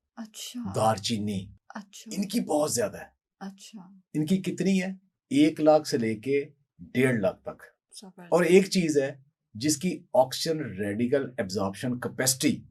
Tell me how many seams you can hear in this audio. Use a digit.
0